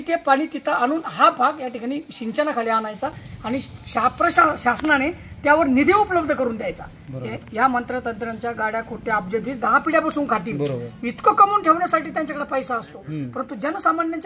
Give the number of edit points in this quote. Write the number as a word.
zero